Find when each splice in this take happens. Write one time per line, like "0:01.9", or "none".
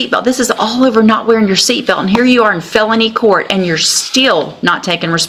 none

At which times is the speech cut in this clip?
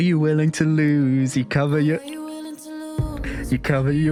none

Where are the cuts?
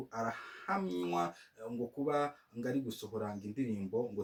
none

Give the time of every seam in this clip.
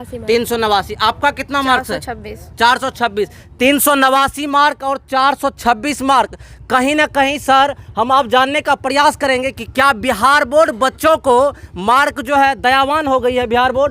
none

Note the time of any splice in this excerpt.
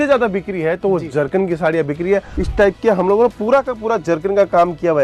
0:02.4

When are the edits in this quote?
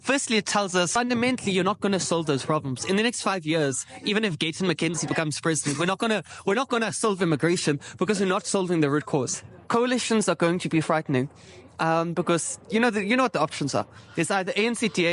0:00.9
0:09.3

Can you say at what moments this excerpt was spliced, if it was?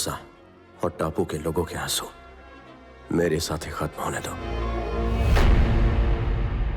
0:04.5

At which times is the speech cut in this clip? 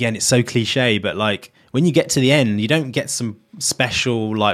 0:01.5

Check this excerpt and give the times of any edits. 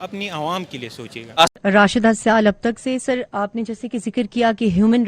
0:01.5

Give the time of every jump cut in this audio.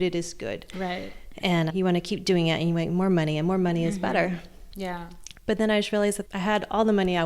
0:05.4
0:06.2

